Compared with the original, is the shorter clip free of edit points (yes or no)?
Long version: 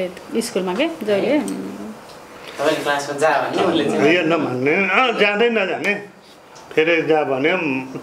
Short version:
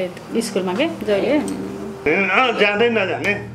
no